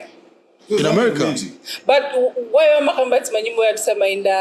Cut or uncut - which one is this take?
uncut